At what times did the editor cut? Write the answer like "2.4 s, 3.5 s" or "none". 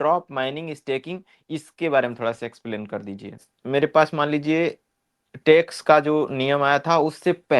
3.5 s